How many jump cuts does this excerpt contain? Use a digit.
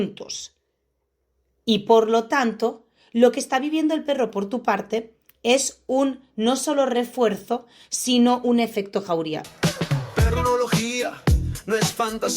1